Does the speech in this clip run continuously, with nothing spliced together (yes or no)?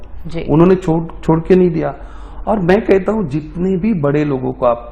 yes